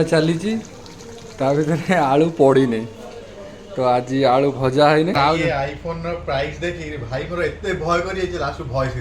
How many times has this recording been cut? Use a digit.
1